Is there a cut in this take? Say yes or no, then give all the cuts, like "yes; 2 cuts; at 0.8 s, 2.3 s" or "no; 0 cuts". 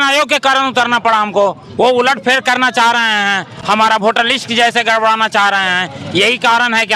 no; 0 cuts